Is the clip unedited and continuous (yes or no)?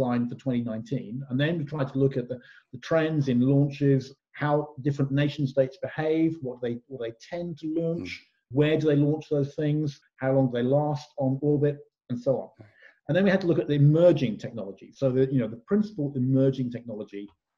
no